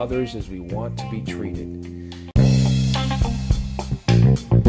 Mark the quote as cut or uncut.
cut